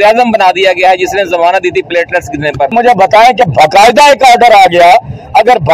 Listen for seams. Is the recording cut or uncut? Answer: cut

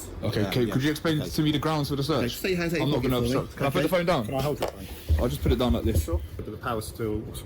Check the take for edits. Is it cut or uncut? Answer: cut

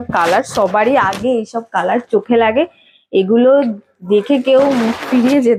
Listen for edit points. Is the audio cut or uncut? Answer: uncut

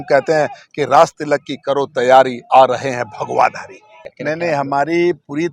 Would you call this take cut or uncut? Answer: cut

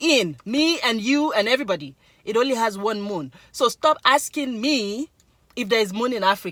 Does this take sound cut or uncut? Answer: uncut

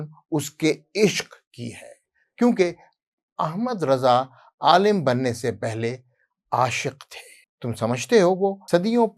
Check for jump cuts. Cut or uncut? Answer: uncut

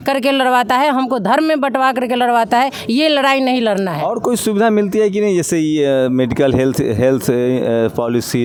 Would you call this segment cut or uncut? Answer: uncut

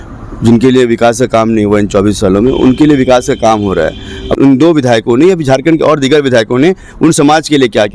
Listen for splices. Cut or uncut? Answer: cut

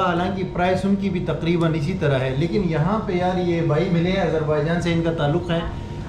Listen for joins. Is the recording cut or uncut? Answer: uncut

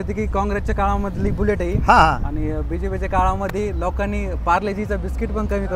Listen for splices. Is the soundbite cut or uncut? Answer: uncut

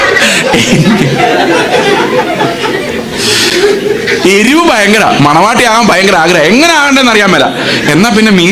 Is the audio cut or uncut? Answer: uncut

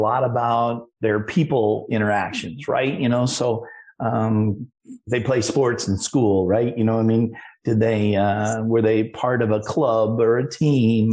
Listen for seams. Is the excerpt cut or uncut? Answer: uncut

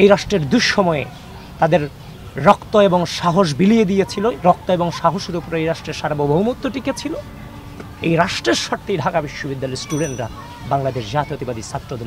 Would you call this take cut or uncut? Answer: uncut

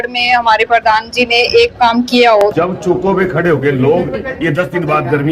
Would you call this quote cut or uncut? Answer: cut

